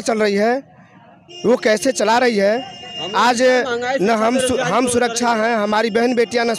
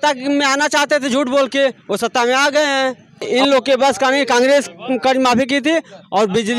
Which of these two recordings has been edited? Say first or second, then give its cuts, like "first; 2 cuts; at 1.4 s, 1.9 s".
second; 1 cut; at 3.3 s